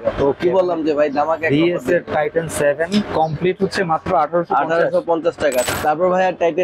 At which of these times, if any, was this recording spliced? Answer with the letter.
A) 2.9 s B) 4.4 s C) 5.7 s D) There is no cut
C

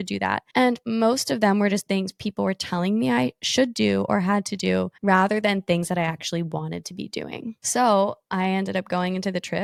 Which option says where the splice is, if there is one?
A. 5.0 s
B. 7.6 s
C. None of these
C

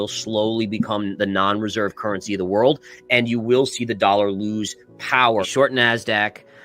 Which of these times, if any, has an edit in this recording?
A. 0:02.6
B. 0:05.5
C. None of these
B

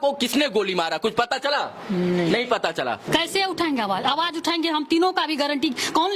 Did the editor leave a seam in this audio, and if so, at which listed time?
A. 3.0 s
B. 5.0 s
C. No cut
A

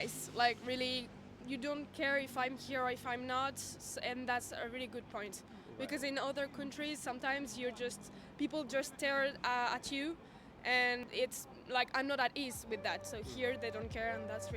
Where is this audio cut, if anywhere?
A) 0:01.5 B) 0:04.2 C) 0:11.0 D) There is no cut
C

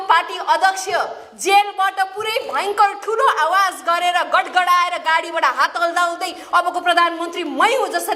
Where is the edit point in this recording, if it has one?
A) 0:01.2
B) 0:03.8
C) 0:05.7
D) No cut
D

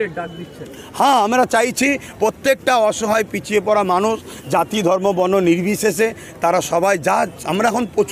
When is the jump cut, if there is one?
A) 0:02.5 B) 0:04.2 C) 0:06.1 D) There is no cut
D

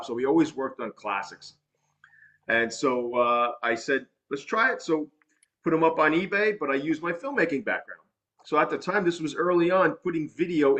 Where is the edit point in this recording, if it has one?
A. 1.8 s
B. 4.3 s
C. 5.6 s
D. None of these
D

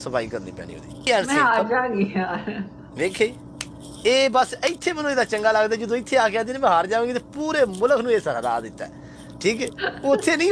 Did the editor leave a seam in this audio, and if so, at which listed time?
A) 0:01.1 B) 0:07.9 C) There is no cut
A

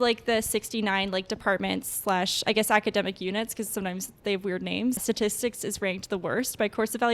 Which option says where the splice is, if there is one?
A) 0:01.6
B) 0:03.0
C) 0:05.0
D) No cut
C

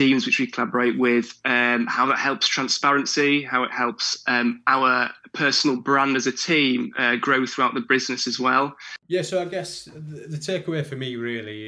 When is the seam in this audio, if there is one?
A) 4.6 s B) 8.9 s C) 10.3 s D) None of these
B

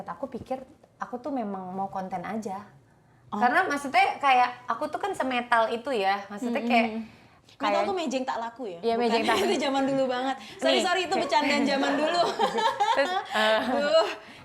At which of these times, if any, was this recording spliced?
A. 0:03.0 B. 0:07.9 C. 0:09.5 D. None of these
D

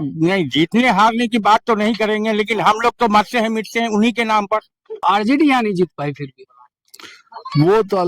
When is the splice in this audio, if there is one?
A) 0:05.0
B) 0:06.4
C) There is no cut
A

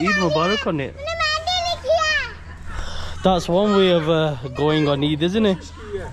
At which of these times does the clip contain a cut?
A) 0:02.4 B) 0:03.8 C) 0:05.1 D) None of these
D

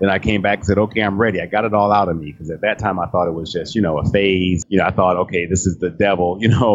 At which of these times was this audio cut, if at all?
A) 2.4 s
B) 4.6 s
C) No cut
B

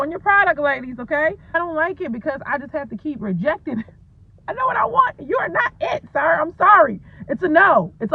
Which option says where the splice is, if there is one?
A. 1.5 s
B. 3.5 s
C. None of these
A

